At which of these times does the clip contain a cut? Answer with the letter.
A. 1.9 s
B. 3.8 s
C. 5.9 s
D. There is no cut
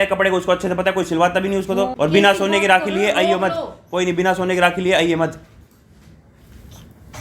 A